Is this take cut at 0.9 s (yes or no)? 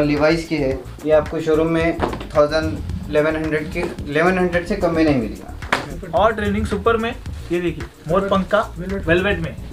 yes